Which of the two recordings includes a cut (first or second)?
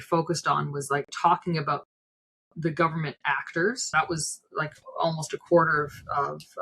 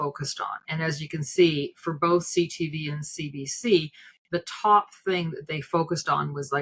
first